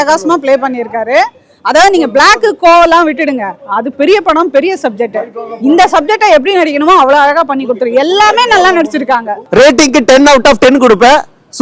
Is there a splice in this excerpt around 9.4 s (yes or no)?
yes